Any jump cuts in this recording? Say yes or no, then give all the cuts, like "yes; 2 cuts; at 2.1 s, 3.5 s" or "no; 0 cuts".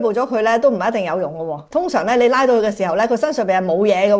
yes; 1 cut; at 1.7 s